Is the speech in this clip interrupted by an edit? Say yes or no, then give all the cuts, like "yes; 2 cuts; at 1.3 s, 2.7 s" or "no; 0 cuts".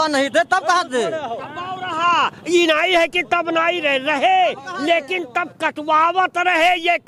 no; 0 cuts